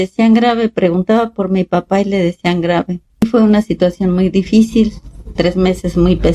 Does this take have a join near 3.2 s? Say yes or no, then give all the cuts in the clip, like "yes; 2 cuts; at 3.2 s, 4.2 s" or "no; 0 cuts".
yes; 1 cut; at 3.2 s